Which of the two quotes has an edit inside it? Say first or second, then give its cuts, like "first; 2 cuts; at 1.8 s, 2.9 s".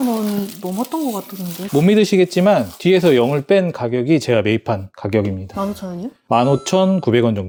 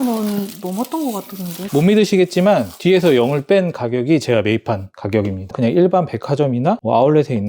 second; 1 cut; at 5.5 s